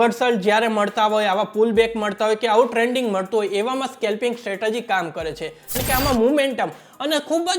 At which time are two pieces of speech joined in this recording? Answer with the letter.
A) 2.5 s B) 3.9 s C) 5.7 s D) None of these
C